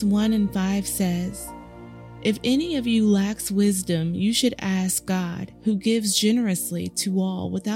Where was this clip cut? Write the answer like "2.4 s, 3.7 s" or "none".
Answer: none